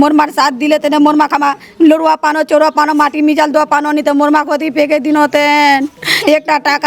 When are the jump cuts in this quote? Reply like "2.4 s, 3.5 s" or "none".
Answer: none